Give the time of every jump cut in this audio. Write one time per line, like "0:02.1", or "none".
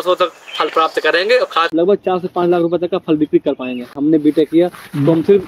0:01.7
0:04.0

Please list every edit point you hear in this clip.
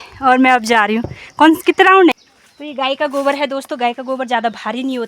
0:02.1

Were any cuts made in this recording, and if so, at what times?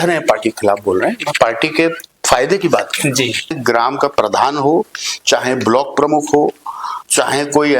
0:03.6

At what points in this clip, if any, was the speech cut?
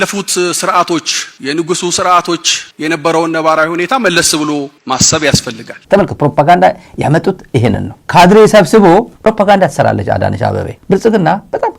0:05.7
0:09.1
0:10.7

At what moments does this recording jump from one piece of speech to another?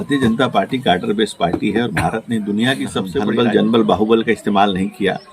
0:03.3

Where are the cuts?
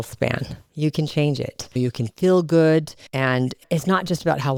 none

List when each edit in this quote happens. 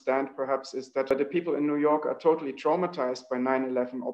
0:01.1

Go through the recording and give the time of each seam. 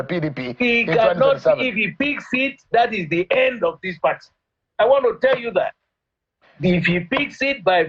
none

